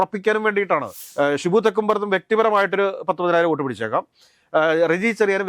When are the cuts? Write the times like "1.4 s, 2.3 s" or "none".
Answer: 1.0 s